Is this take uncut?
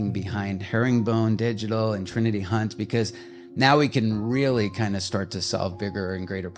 yes; 0 cuts

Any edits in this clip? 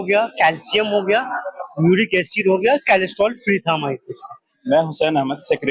no; 0 cuts

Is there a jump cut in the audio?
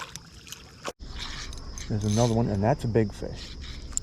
yes; 1 cut; at 0.9 s

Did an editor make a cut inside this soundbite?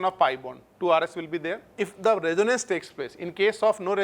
yes; 1 cut; at 1.6 s

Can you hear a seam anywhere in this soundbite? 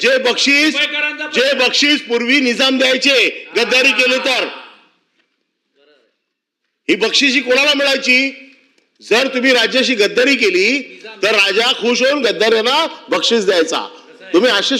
no; 0 cuts

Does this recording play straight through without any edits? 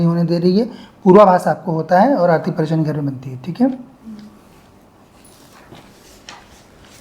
yes; 0 cuts

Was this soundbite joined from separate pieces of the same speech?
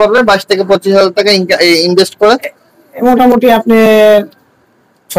no; 0 cuts

